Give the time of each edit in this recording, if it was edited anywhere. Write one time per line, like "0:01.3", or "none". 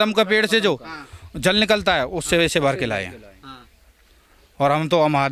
none